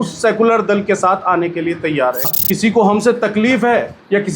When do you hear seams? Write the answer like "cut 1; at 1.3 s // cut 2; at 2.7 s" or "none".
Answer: cut 1; at 2.4 s